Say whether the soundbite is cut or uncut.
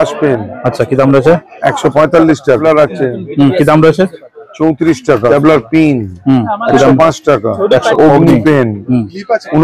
cut